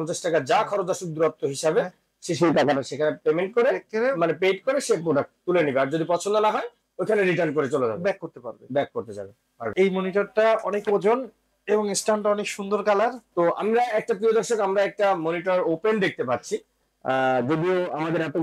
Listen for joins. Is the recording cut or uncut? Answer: cut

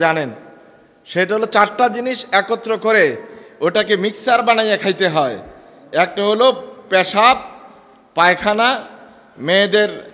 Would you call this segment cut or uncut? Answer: uncut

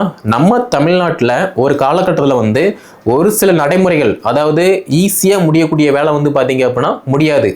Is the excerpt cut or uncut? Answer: uncut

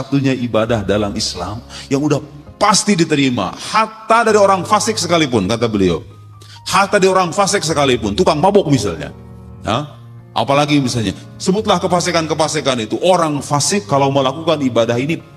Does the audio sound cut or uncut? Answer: uncut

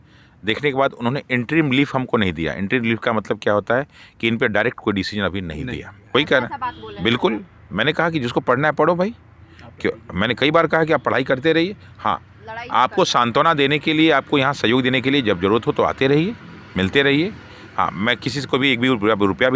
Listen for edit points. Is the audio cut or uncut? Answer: cut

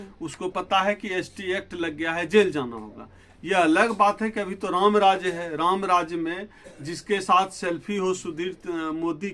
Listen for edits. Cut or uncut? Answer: uncut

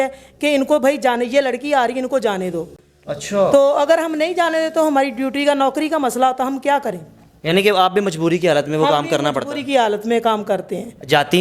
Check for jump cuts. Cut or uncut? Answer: uncut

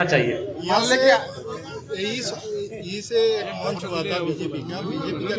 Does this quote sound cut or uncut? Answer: uncut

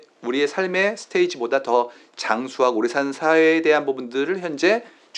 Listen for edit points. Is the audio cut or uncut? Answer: uncut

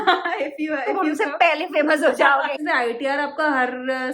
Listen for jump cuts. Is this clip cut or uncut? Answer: cut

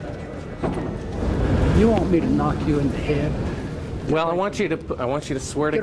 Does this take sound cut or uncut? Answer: cut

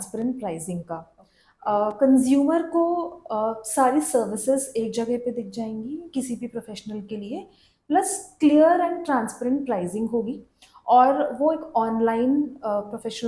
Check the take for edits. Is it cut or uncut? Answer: uncut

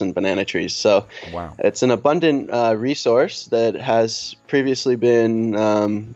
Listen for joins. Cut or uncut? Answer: uncut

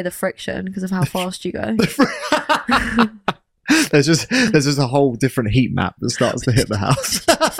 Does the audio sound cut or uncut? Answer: uncut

